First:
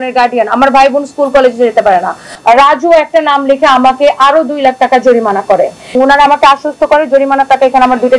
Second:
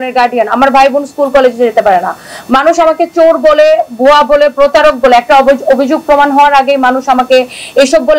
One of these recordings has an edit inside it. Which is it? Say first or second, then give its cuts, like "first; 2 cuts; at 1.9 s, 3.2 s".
first; 2 cuts; at 2.3 s, 5.9 s